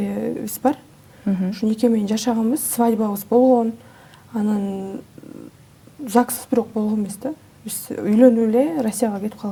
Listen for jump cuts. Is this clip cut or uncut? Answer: uncut